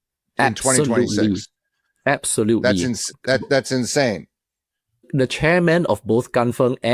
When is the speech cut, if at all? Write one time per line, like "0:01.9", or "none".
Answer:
0:05.1